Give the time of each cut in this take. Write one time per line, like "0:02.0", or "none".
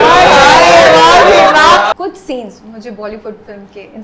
0:01.9

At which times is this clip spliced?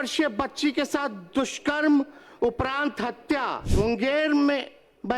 0:03.6

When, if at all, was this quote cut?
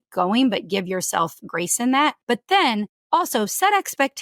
0:02.2

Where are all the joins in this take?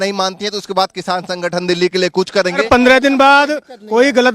0:02.6

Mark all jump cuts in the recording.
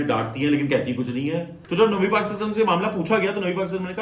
0:01.6

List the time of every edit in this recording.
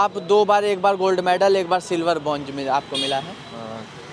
none

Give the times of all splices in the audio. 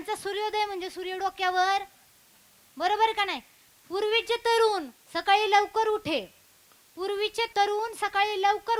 0:07.5

